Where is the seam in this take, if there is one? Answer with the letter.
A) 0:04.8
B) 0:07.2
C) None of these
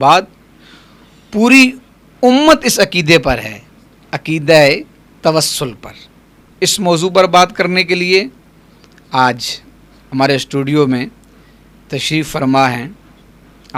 C